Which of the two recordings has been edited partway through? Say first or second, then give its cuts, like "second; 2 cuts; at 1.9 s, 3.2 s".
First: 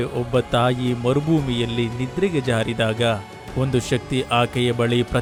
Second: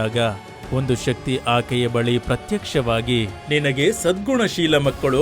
second; 1 cut; at 3.3 s